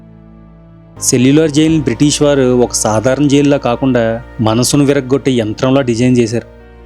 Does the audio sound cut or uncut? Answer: cut